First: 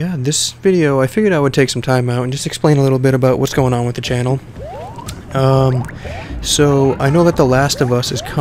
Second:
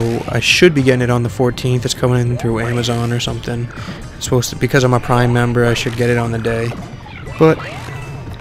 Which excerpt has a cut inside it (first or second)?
first